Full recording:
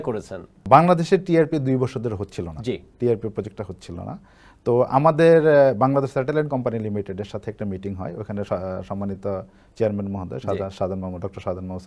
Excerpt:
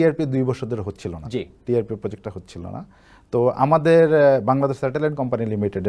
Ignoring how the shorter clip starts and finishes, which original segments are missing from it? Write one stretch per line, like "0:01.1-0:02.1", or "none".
none